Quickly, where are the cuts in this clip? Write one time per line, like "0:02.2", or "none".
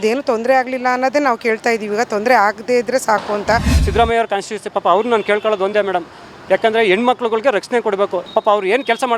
0:03.8
0:08.2